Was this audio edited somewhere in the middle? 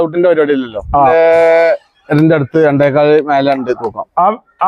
yes; 1 cut; at 1.1 s

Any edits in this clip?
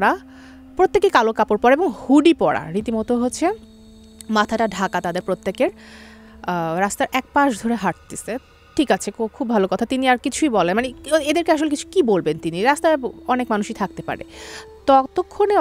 no; 0 cuts

